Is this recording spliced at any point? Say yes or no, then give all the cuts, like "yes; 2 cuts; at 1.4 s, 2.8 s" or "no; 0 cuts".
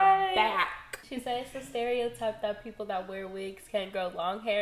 yes; 1 cut; at 1.0 s